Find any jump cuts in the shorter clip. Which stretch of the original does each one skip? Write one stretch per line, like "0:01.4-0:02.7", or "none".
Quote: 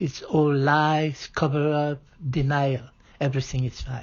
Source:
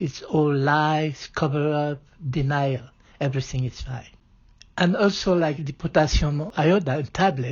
none